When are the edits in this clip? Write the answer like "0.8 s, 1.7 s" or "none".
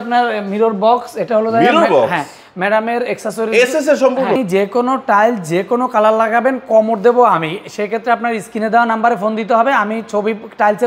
4.3 s